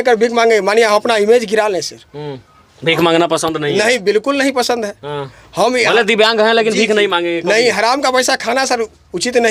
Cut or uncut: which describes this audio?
uncut